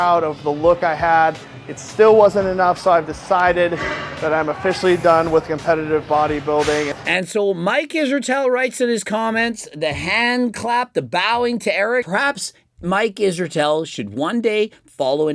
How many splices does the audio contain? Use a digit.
2